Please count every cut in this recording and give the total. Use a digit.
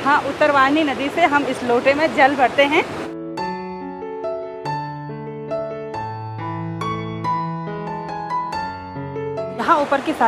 0